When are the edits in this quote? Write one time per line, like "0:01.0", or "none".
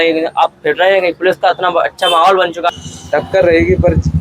0:02.7